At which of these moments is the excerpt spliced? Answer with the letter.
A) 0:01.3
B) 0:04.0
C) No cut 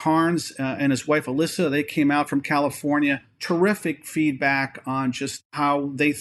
C